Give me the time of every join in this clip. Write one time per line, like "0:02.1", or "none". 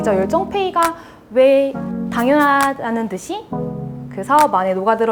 none